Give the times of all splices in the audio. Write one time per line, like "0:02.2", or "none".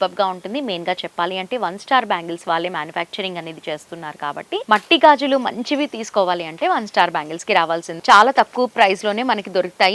0:04.6
0:07.9